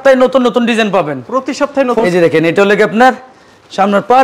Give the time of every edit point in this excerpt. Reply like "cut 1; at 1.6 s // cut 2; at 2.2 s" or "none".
cut 1; at 2.0 s

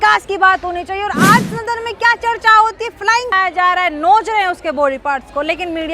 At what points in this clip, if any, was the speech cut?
cut 1; at 3.3 s

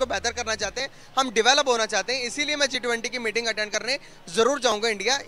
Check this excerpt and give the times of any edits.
none

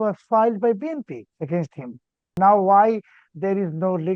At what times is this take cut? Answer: cut 1; at 2.3 s

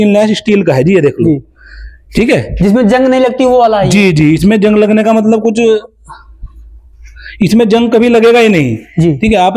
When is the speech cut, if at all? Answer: none

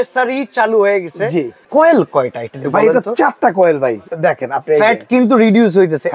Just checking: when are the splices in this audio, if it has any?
cut 1; at 1.7 s // cut 2; at 4.0 s

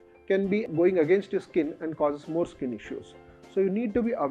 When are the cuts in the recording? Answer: none

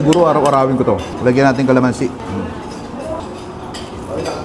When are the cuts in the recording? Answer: cut 1; at 1.1 s // cut 2; at 2.2 s // cut 3; at 3.2 s

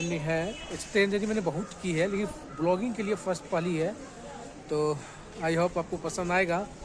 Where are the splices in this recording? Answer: none

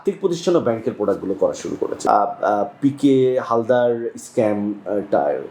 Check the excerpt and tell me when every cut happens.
cut 1; at 1.9 s

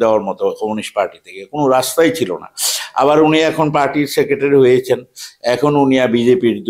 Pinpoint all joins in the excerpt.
none

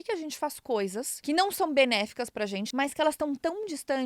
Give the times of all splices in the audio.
cut 1; at 1.1 s // cut 2; at 2.6 s

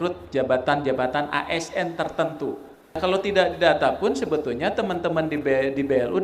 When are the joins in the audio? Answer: cut 1; at 3.0 s

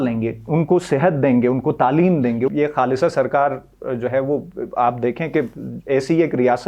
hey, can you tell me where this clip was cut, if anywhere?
cut 1; at 2.5 s

